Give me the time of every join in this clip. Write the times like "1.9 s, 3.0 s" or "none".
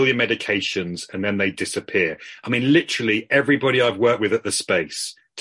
none